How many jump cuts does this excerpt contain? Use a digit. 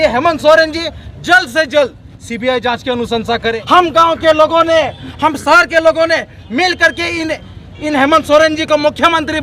1